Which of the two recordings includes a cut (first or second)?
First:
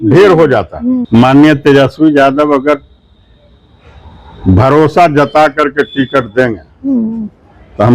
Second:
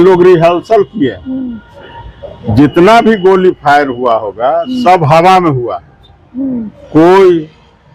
first